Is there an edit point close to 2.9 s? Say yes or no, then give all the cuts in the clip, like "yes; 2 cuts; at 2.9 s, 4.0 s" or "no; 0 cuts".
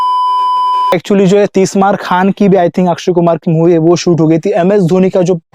no; 1 cut; at 0.9 s